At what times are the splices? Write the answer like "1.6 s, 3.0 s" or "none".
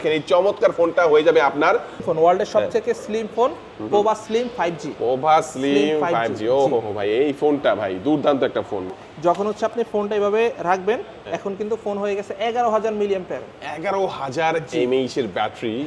2.0 s, 8.9 s